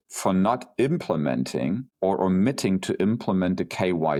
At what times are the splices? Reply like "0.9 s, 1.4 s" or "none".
none

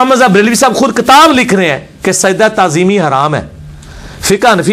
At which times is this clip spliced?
none

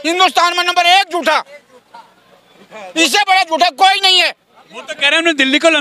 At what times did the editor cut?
none

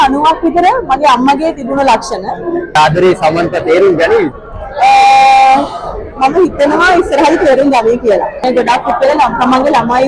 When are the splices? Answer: 2.8 s, 8.4 s

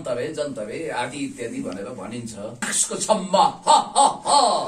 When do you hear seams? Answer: 2.8 s

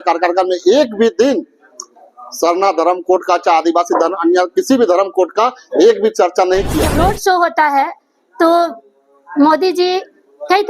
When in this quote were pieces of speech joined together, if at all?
6.8 s

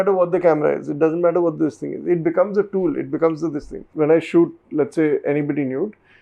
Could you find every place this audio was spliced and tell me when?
3.9 s

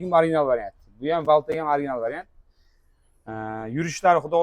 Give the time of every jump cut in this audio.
none

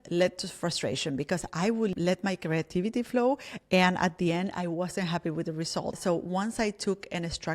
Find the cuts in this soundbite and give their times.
1.9 s, 5.9 s

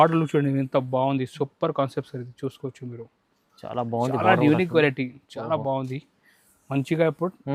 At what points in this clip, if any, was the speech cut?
none

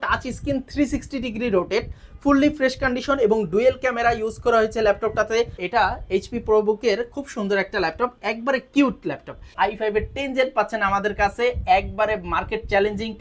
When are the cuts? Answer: 5.6 s, 9.5 s

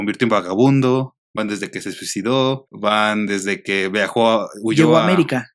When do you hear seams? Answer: none

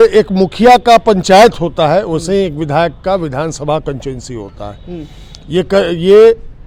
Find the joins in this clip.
none

